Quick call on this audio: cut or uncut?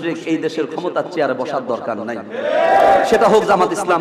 cut